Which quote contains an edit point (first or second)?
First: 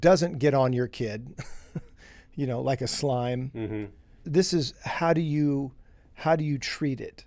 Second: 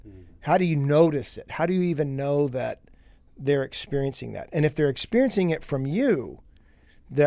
first